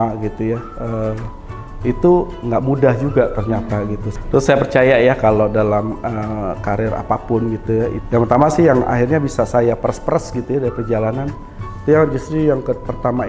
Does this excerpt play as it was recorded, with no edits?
no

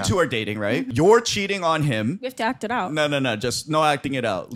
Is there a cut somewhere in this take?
yes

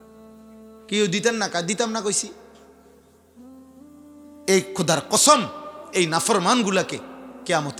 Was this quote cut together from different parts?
no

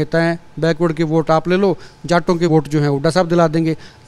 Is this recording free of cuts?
no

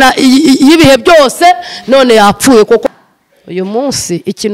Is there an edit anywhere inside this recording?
yes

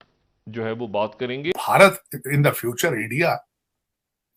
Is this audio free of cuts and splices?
no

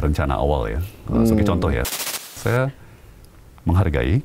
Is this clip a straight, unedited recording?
no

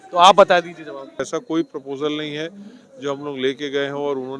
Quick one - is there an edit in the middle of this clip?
yes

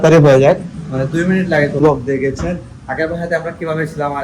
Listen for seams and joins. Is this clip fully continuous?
no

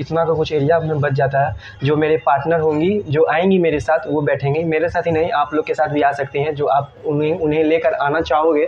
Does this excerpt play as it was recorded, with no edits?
yes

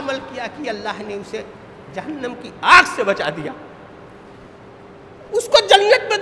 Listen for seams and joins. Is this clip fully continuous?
yes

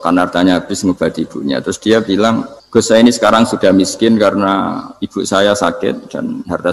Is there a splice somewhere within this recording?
yes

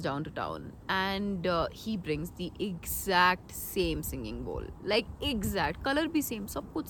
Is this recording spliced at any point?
no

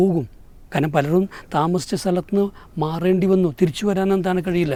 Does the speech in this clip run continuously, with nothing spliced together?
yes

